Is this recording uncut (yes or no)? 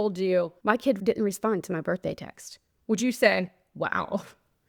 no